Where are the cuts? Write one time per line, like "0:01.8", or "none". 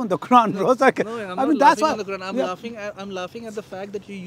none